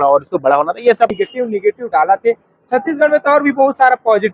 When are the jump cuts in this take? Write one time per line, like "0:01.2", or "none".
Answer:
0:01.1